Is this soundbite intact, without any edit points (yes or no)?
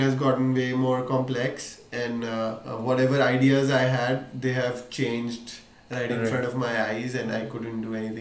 yes